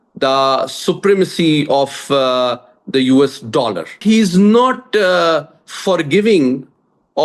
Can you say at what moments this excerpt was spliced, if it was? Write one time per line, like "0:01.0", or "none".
0:03.9